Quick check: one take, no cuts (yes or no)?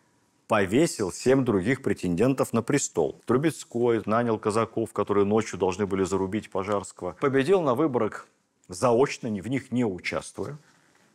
no